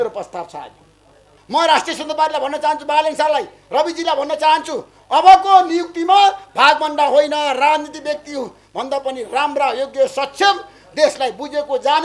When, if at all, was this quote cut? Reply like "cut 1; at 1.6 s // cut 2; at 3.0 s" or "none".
cut 1; at 1.3 s